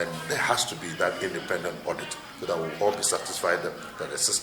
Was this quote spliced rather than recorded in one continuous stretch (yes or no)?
no